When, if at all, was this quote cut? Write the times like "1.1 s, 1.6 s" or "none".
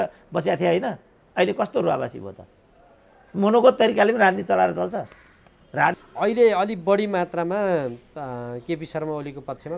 6.0 s